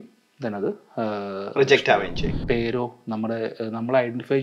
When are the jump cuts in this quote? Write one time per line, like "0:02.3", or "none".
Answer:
0:02.4